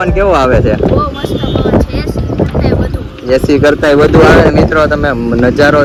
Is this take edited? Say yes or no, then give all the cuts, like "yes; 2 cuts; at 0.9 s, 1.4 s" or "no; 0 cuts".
no; 0 cuts